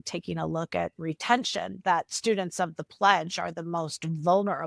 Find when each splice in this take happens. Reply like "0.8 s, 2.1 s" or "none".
2.1 s